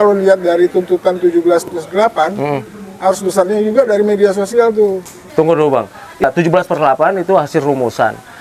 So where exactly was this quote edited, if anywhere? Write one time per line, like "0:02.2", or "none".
0:05.2
0:06.2